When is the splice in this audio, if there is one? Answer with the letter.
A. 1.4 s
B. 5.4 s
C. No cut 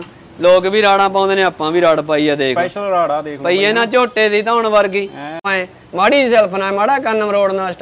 B